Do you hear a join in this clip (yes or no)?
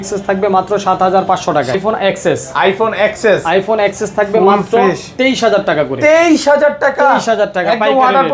yes